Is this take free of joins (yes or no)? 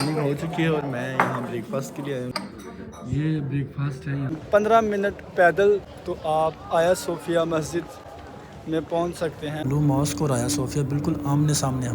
no